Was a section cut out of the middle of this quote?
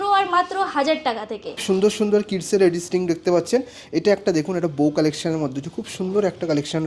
yes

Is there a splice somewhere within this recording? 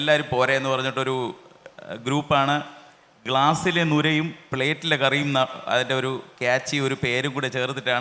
no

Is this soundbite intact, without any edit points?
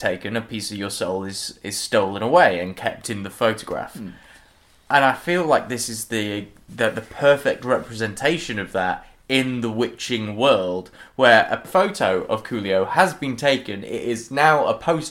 no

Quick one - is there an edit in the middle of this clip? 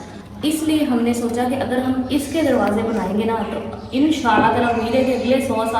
no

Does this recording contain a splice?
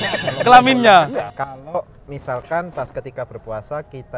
yes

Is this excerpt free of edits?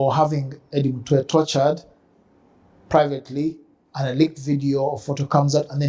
yes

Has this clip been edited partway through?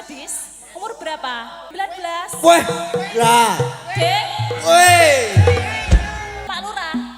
yes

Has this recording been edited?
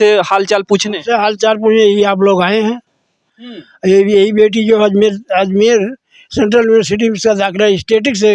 no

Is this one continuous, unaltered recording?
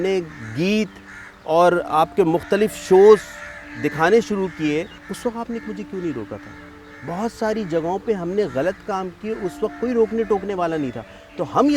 no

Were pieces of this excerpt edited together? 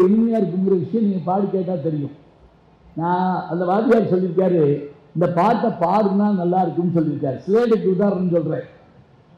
no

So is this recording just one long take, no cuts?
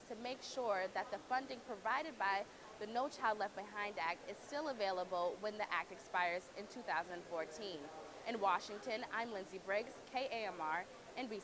yes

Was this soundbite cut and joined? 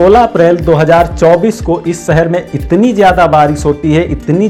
no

